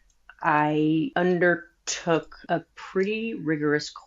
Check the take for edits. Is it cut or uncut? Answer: cut